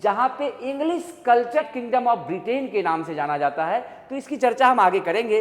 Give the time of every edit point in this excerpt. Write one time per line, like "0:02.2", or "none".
0:01.6